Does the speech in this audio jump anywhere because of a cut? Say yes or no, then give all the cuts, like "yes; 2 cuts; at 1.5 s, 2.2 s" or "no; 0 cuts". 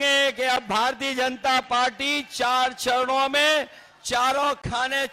no; 0 cuts